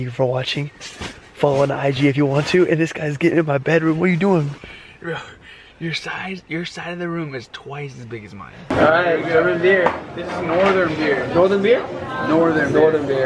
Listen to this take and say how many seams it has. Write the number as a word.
one